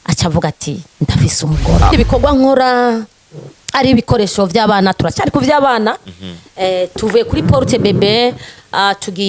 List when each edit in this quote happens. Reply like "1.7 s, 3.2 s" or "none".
1.9 s